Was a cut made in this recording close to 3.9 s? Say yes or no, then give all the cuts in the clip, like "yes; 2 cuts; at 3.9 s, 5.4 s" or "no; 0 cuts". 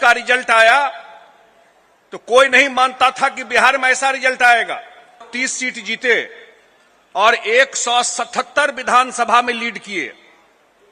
no; 1 cut; at 5.3 s